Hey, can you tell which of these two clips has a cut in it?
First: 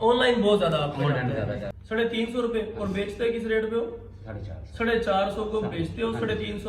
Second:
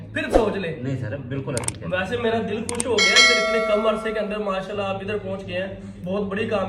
first; 1 cut; at 1.7 s

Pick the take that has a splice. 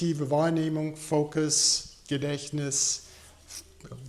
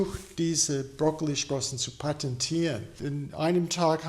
second; 1 cut; at 2.9 s

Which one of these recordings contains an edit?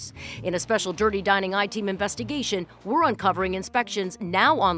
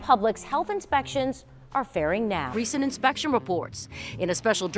second; 1 cut; at 2.5 s

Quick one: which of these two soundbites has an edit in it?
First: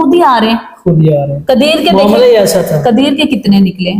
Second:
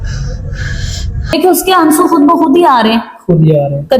second; 1 cut; at 1.2 s

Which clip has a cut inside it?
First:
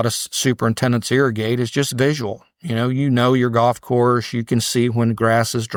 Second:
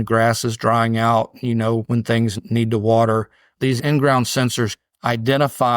second; 3 cuts; at 1.8 s, 3.4 s, 4.7 s

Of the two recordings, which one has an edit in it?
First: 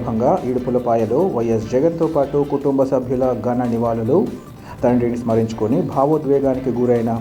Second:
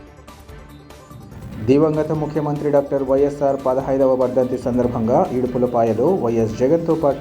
second; 1 cut; at 1.3 s

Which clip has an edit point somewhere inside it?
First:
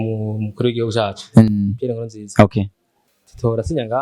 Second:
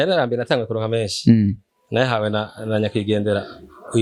first; 1 cut; at 3.1 s

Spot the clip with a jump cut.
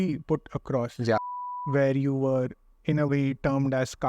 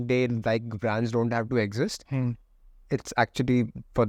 first; 1 cut; at 1.2 s

